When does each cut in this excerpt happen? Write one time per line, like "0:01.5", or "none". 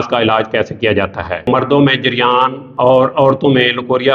0:01.5
0:02.6